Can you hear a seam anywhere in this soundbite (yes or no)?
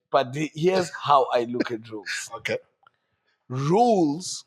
no